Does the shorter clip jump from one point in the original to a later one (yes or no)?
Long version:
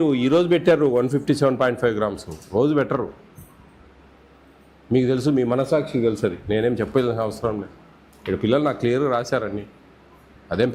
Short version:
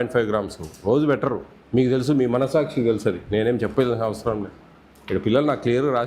yes